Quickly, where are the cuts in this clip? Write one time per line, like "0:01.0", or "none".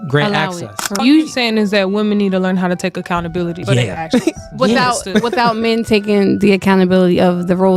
0:01.0
0:03.6